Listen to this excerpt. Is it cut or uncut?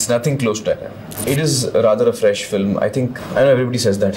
cut